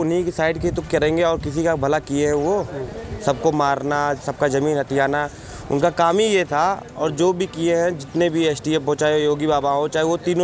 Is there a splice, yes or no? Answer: no